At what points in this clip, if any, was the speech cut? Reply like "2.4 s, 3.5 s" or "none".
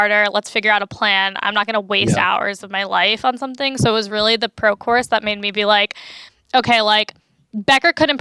none